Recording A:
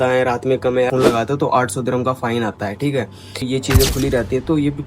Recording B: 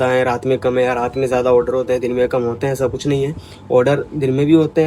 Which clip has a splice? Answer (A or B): A